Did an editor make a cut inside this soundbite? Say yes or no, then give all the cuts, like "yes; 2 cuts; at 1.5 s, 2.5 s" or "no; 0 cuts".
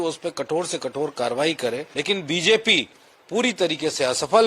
yes; 1 cut; at 1.9 s